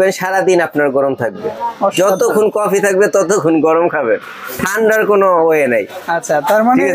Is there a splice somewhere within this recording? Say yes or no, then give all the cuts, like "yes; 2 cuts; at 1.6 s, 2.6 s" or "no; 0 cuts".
no; 0 cuts